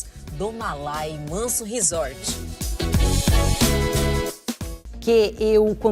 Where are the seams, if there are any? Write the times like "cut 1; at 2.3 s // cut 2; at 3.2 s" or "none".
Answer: cut 1; at 4.9 s